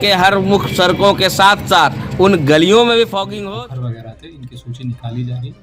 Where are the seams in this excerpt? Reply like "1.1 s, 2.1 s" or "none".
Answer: 3.3 s